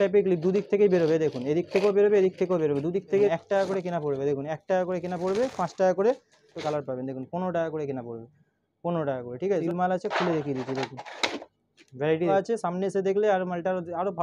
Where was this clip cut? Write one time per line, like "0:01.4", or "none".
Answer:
0:03.3
0:06.6
0:09.6
0:12.3